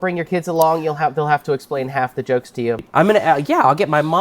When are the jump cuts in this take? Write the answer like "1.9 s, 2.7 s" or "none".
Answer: 2.8 s